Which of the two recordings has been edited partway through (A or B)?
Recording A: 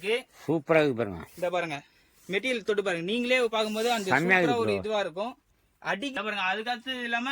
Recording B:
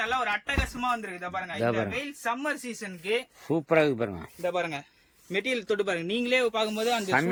A